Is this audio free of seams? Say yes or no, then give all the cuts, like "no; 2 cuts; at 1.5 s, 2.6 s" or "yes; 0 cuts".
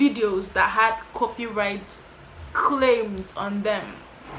yes; 0 cuts